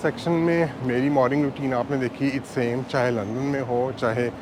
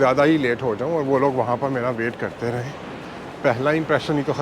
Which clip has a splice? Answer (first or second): second